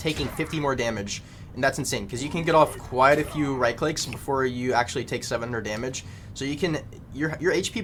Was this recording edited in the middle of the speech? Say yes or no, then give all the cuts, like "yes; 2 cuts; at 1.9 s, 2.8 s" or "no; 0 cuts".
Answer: no; 0 cuts